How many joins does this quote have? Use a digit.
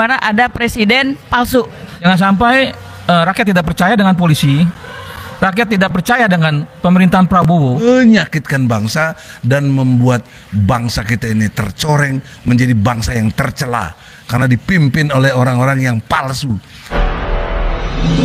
3